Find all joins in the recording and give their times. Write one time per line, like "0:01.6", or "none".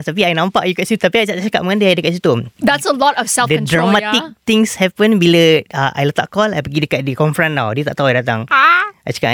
none